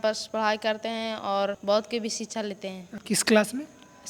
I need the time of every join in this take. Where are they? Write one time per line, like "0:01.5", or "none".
0:01.6
0:02.9